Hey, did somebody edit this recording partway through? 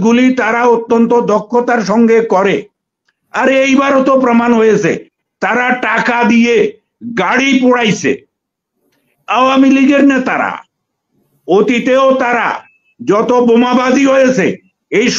no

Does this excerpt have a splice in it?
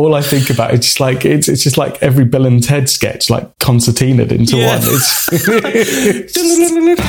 no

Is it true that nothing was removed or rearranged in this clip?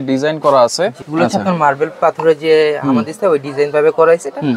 no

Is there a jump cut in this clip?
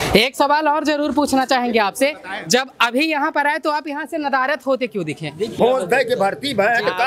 yes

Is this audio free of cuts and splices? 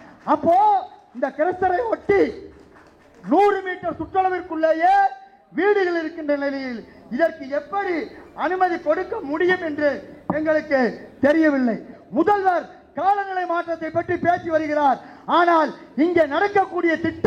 no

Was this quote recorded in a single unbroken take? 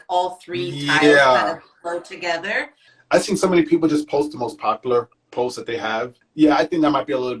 no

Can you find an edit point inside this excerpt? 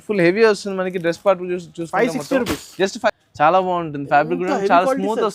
yes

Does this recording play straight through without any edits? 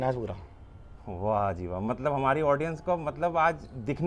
yes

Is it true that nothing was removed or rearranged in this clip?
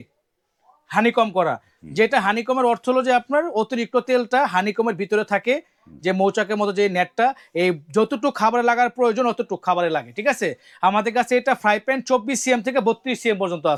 yes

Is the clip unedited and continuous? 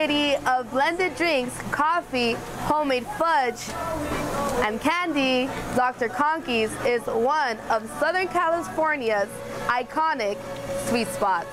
yes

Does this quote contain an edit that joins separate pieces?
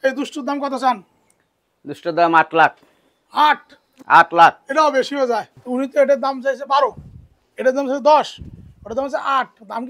yes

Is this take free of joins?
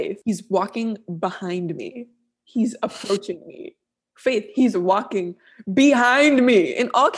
yes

